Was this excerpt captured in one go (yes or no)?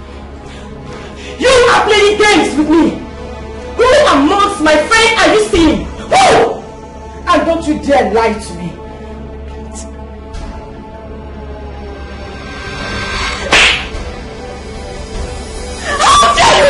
yes